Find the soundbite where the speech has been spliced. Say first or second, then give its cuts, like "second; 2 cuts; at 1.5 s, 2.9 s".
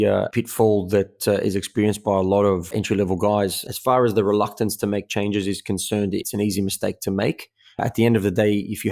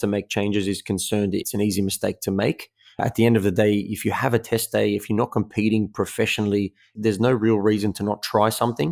first; 1 cut; at 3.7 s